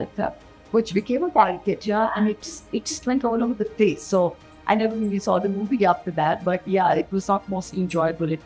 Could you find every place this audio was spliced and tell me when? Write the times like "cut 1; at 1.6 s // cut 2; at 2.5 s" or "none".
none